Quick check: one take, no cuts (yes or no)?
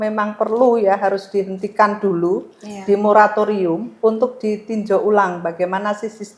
yes